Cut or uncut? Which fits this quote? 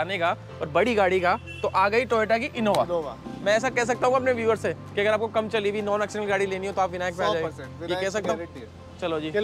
cut